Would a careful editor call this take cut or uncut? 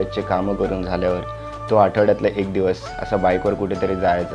uncut